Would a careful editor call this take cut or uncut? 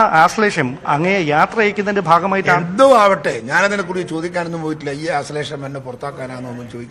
uncut